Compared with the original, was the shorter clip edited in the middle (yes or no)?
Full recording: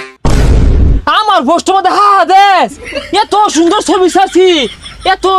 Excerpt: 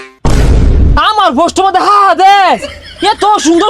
yes